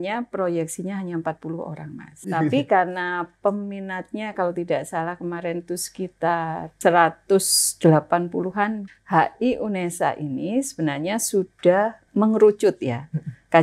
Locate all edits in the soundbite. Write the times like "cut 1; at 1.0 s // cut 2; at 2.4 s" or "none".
cut 1; at 2.3 s // cut 2; at 6.6 s // cut 3; at 8.9 s // cut 4; at 12.0 s